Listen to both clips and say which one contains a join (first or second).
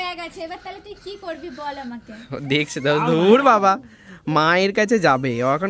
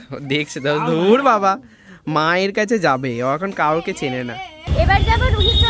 second